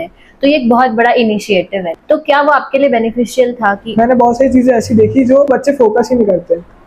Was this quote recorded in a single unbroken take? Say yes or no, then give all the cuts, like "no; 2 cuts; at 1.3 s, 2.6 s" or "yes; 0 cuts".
no; 3 cuts; at 1.9 s, 3.8 s, 5.5 s